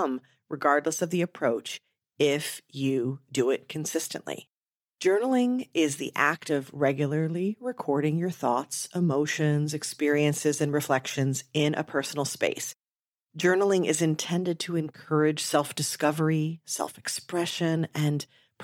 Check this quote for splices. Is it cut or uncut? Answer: cut